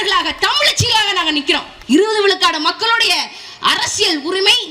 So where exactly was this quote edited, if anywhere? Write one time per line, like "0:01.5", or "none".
0:01.7